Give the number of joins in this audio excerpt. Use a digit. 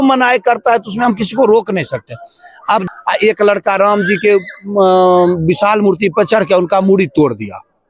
1